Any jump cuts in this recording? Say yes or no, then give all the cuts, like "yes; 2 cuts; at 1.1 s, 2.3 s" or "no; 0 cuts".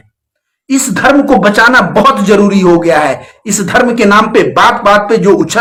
no; 0 cuts